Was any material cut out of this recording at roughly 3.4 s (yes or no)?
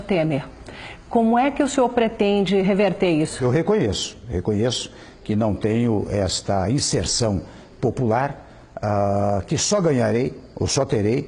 yes